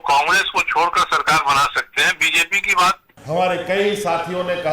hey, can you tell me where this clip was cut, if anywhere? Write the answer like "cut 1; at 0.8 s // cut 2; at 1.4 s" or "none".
cut 1; at 3.1 s